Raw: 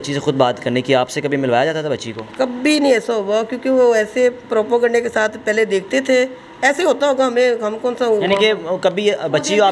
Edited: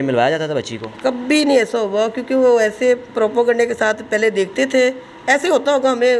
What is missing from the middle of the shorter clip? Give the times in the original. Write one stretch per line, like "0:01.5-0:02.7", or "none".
none